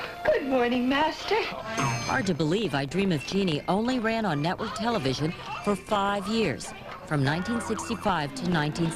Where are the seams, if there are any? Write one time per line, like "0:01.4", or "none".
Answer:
none

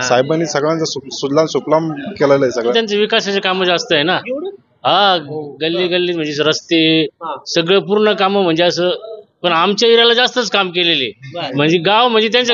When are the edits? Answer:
0:02.7
0:11.5

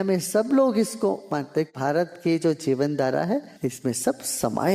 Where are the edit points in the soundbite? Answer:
0:01.7
0:03.5

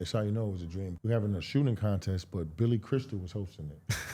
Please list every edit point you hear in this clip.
0:00.9

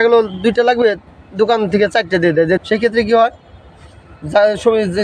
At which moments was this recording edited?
0:02.6

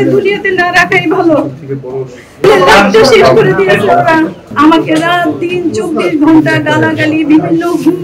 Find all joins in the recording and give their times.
none

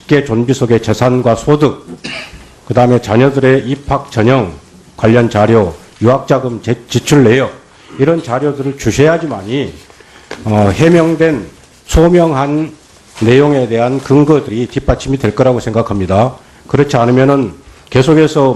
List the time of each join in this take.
0:07.5

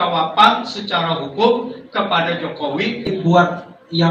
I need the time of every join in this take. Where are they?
0:03.1

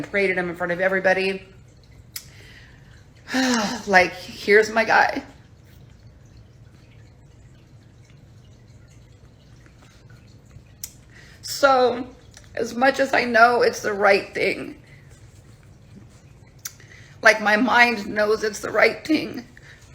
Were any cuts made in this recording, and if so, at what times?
0:14.0

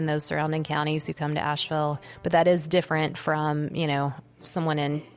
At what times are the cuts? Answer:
0:02.1

